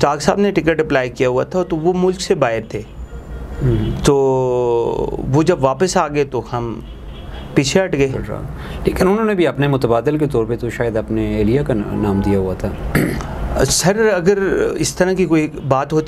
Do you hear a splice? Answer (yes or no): no